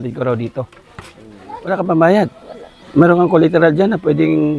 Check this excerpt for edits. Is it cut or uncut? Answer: cut